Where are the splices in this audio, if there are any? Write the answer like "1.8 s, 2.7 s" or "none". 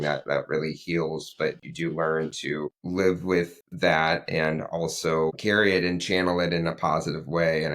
2.8 s, 5.4 s

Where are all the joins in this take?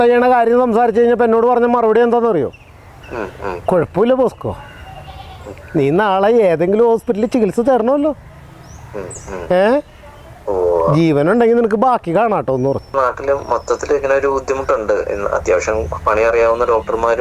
13.0 s

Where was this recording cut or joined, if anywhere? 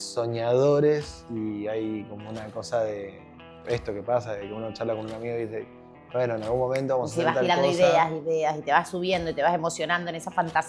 none

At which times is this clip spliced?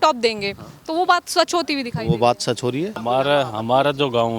3.0 s

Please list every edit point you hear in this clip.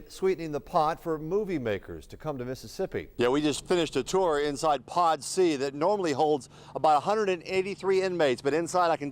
3.1 s

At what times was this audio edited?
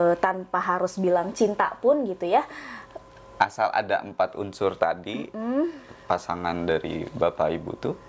none

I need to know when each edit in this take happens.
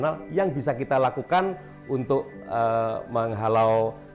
none

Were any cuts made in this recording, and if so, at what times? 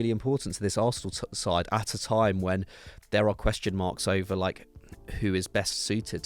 none

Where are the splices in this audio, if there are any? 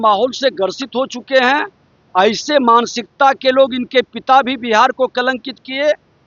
none

